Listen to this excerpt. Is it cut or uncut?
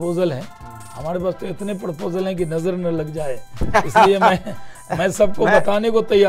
uncut